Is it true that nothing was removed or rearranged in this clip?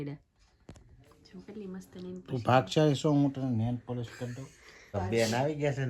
no; 1 cut; at 4.9 s

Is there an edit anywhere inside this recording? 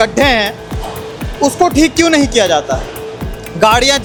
no; 0 cuts

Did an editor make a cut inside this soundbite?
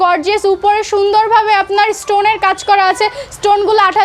no; 0 cuts

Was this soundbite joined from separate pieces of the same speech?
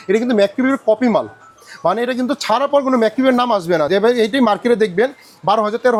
no; 0 cuts

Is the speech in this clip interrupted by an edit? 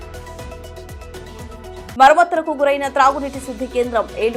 no; 0 cuts

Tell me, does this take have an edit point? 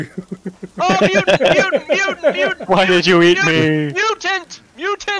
no; 0 cuts

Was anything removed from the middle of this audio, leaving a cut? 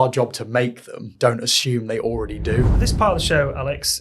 yes; 2 cuts; at 1.0 s, 2.8 s

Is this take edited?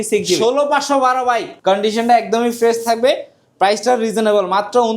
yes; 1 cut; at 1.5 s

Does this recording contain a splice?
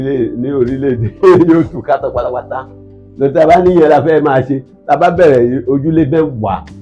no; 0 cuts

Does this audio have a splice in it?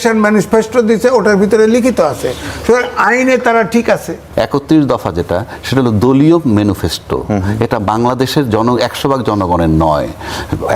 yes; 1 cut; at 4.2 s

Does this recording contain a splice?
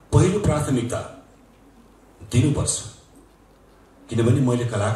no; 0 cuts

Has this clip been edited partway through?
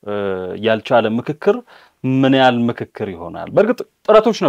no; 0 cuts

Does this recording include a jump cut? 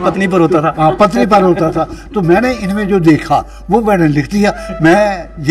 no; 0 cuts

